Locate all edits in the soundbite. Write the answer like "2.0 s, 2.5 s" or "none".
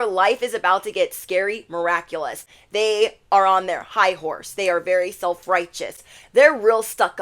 2.4 s, 6.1 s